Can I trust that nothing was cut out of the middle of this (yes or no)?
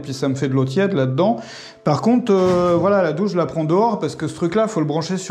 yes